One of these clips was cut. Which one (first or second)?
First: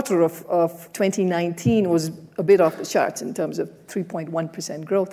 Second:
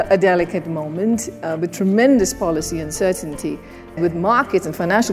second